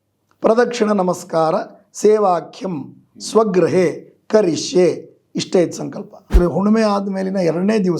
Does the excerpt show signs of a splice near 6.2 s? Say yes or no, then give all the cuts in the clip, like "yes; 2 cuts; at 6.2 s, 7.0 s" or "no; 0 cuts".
yes; 1 cut; at 6.2 s